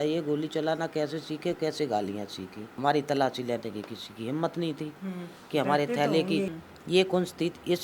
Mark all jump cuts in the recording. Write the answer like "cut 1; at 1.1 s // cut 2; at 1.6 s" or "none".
cut 1; at 2.7 s // cut 2; at 6.6 s